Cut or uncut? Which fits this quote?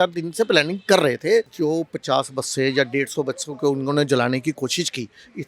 cut